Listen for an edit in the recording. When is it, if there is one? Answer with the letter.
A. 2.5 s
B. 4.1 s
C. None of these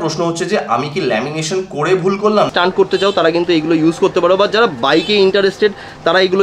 A